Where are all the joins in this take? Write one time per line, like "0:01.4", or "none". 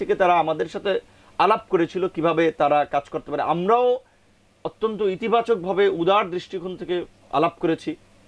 none

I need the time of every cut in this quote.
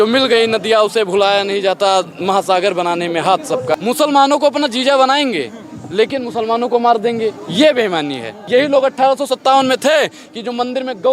0:03.8
0:08.4

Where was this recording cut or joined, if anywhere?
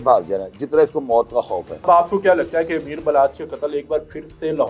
0:01.8

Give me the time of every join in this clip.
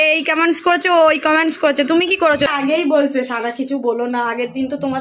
0:02.5

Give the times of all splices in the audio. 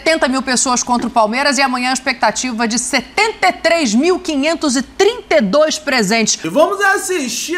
0:06.5

